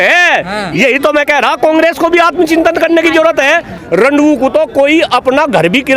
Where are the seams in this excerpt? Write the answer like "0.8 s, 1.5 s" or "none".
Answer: 3.8 s